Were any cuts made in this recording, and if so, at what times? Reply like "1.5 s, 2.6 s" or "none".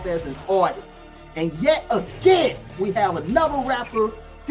2.7 s

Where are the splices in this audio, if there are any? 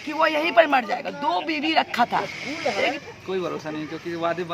2.9 s

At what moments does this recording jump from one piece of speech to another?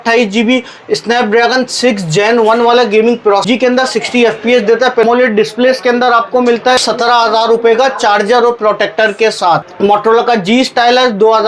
3.4 s, 5.0 s, 6.8 s, 9.7 s

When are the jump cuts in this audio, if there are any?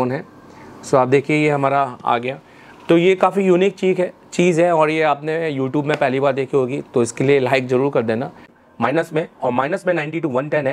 8.6 s

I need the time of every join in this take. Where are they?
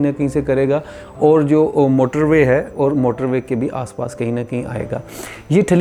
none

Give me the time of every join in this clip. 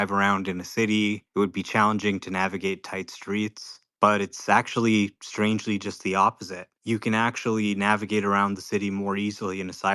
none

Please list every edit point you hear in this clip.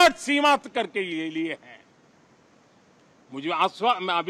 none

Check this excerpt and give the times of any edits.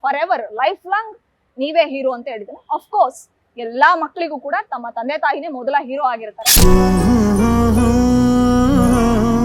6.4 s

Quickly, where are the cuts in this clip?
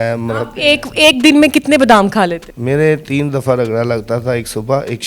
2.5 s

